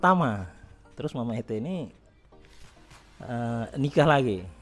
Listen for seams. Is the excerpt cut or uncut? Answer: uncut